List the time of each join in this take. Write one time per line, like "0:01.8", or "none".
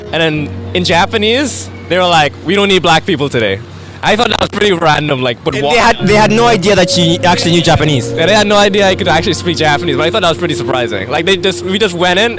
none